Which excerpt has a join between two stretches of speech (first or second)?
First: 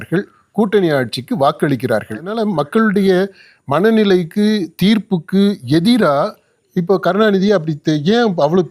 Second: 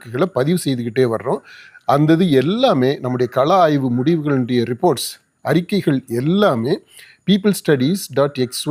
first